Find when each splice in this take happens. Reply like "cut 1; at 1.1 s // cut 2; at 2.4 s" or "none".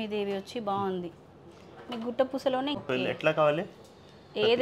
cut 1; at 2.8 s